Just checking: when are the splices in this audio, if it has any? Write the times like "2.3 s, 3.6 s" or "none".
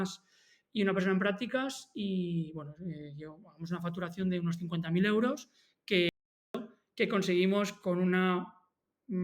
6.6 s